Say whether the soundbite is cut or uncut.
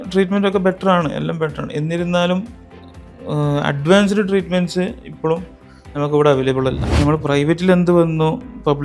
cut